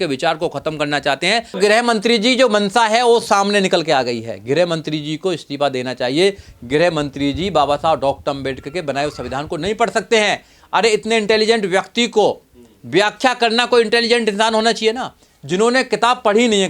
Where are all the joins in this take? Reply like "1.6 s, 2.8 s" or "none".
1.6 s